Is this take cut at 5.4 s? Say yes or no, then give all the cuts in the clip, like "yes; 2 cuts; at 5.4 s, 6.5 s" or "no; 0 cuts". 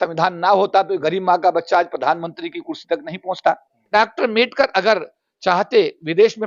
no; 1 cut; at 3.9 s